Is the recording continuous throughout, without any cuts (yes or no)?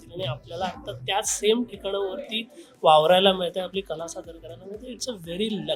yes